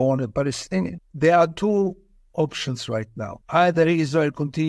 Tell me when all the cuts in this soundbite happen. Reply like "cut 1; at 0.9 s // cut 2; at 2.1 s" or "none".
cut 1; at 1.0 s // cut 2; at 3.4 s